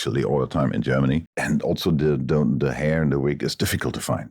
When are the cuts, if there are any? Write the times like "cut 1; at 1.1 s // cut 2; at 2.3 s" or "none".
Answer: cut 1; at 1.3 s